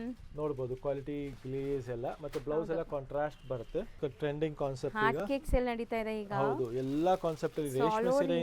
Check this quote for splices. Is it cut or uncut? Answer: cut